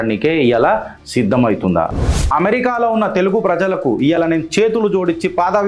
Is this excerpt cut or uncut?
cut